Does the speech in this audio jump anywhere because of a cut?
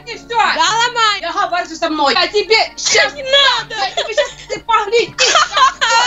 yes; 2 cuts; at 1.2 s, 2.2 s

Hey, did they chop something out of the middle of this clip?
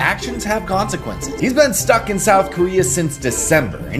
no; 0 cuts

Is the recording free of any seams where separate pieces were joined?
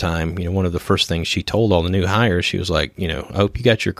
yes; 0 cuts

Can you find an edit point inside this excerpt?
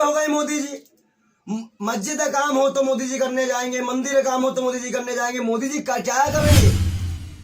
yes; 1 cut; at 6.5 s

